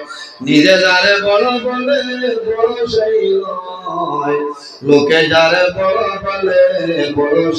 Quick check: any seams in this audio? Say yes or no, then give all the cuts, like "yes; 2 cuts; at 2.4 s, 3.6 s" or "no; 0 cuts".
no; 0 cuts